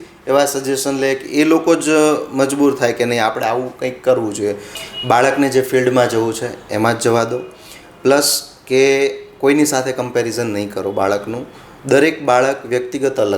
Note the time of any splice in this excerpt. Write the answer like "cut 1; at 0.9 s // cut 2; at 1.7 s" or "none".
cut 1; at 4.7 s